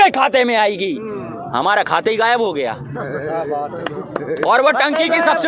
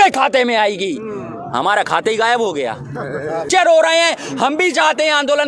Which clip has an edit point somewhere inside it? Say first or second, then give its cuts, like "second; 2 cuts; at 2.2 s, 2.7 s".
second; 1 cut; at 3.4 s